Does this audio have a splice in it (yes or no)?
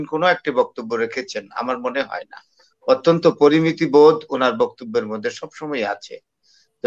no